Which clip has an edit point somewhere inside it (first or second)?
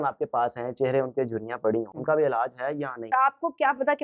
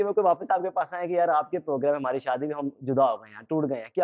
first